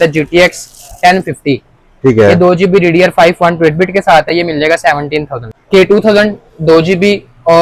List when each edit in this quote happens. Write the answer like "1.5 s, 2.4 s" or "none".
5.6 s

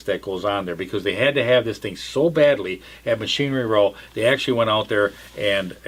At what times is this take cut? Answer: none

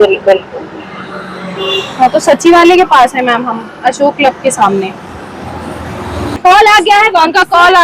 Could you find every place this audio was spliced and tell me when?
6.4 s

